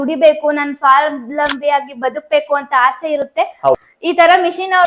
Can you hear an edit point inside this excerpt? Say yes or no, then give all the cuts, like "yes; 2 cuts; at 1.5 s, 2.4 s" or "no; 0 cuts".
yes; 1 cut; at 3.7 s